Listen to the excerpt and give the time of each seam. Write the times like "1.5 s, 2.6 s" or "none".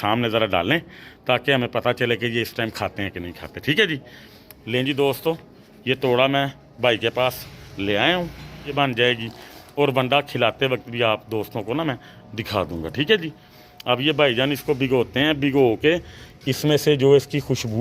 8.7 s